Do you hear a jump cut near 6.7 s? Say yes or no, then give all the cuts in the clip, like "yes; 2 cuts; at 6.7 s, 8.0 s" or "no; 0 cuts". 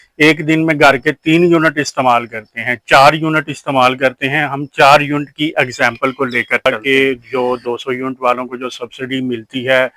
yes; 1 cut; at 6.7 s